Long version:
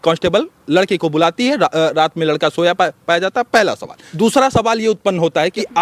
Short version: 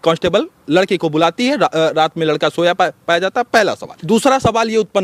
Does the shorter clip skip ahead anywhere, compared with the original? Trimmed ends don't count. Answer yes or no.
yes